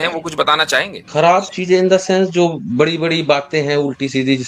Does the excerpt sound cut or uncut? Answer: cut